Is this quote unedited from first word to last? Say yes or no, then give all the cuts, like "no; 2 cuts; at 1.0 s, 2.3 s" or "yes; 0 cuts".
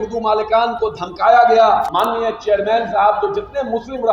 no; 1 cut; at 1.9 s